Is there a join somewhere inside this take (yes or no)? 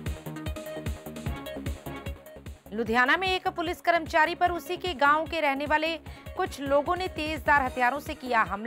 yes